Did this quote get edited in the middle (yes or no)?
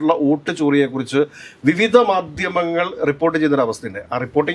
no